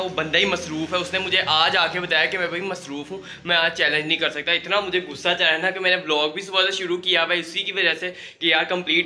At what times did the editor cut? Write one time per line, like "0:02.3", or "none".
none